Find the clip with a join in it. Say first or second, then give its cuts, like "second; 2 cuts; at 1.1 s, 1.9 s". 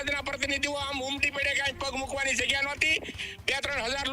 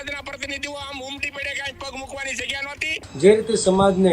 second; 1 cut; at 3.0 s